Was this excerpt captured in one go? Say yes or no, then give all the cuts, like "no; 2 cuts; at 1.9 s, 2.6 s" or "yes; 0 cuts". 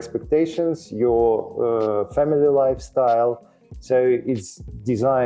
yes; 0 cuts